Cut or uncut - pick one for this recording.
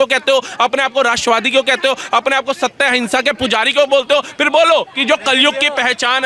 uncut